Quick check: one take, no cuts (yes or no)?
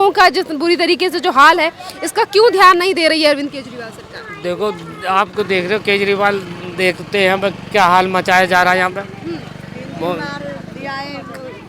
yes